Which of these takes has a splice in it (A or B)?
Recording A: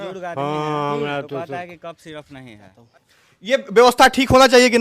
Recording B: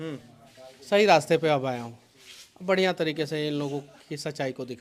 A